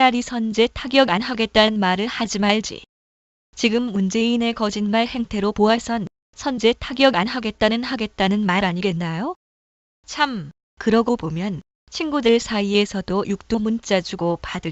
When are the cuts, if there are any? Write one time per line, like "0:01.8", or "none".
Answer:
0:07.0